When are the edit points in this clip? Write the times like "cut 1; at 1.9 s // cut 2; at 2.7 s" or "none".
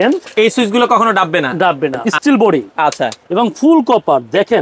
cut 1; at 2.0 s